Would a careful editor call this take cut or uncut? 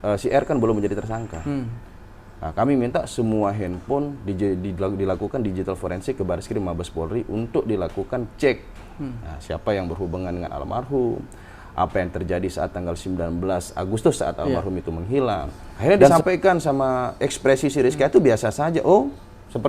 cut